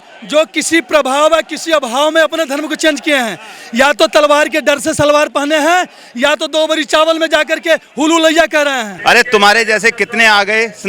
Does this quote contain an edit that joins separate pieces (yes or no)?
yes